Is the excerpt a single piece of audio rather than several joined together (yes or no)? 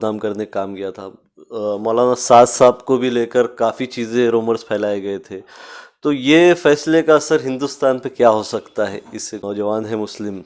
no